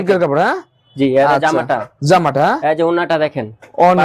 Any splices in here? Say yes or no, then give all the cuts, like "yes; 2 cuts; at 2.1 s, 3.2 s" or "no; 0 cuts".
no; 0 cuts